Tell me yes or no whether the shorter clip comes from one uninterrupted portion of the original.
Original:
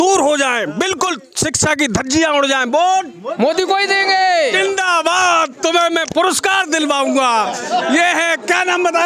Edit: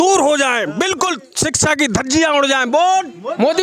yes